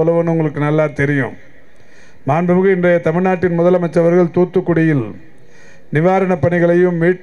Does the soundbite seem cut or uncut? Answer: uncut